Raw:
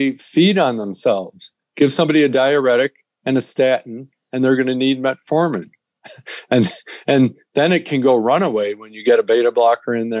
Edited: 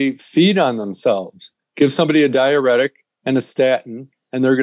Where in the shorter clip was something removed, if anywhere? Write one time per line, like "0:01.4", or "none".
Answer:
none